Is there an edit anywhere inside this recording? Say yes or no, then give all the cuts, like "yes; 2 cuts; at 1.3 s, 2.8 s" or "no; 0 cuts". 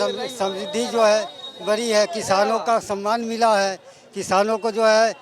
no; 0 cuts